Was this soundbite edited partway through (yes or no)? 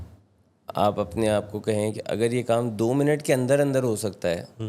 no